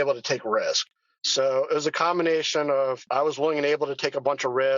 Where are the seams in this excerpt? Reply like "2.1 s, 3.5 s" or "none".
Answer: 1.0 s, 3.0 s